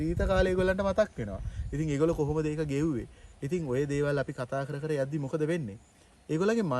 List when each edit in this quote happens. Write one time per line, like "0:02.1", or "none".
none